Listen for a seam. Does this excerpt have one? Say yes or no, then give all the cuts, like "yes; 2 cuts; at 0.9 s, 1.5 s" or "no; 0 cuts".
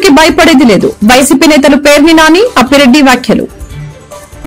yes; 1 cut; at 3.5 s